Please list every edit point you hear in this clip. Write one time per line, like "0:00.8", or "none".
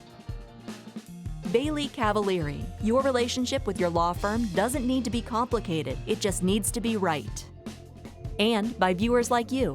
0:01.4